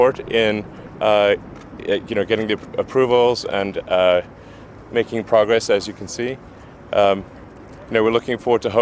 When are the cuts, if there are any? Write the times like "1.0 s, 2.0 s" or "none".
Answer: none